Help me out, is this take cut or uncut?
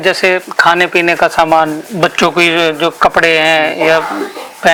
uncut